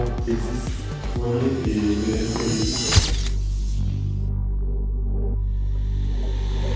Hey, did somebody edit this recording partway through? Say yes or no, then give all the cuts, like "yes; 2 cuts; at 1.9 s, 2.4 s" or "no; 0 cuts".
no; 0 cuts